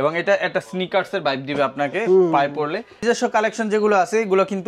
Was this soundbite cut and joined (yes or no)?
yes